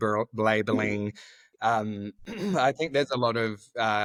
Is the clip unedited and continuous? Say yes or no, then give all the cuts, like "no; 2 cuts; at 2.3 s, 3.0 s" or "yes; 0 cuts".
yes; 0 cuts